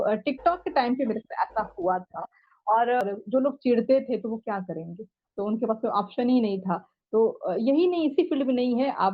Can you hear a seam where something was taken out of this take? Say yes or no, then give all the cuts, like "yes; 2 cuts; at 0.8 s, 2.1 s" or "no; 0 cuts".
yes; 1 cut; at 3.0 s